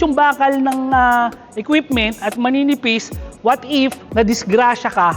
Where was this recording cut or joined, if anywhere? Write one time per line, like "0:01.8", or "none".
0:04.0